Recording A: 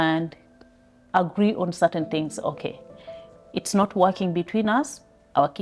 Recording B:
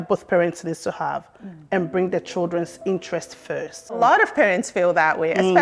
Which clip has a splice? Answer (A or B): B